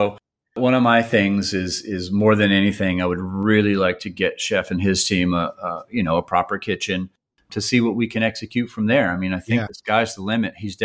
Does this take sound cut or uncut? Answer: uncut